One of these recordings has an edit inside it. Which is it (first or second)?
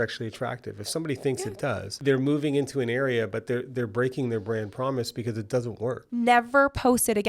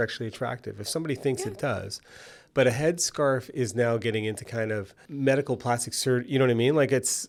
first